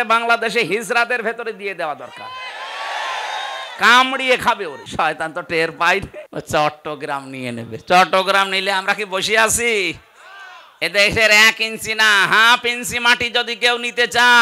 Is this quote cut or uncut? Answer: cut